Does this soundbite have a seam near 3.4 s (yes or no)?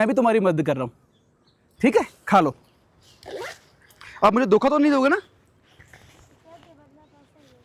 no